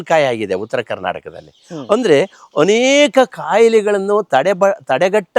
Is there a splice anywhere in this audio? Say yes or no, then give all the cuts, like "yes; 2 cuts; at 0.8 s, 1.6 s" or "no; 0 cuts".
no; 0 cuts